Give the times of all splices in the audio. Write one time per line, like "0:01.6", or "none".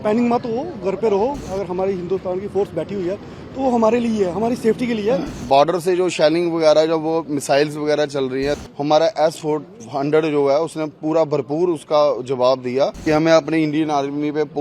0:01.4
0:05.4
0:08.6
0:13.0